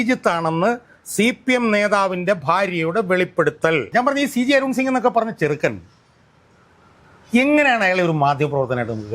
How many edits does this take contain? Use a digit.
1